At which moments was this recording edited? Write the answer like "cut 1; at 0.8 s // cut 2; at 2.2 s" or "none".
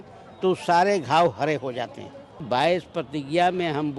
cut 1; at 2.4 s